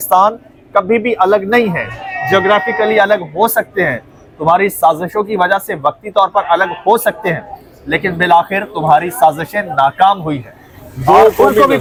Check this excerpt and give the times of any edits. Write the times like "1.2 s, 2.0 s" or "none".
none